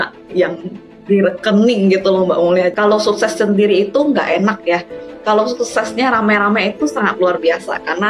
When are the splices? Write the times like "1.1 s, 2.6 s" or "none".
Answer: 2.8 s